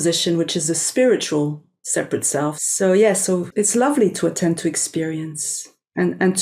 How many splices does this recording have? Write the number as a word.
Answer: two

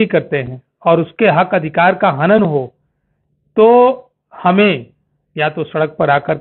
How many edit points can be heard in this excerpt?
zero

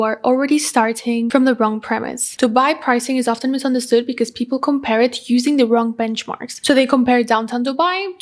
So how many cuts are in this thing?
two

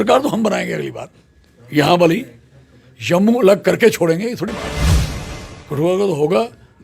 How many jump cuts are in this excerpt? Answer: three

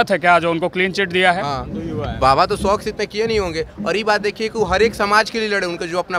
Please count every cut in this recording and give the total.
one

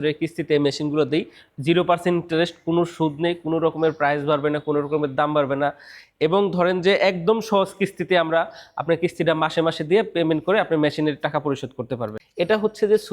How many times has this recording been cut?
one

